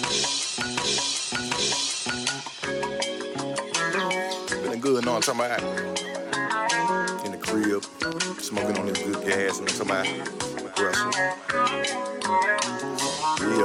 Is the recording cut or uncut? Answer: uncut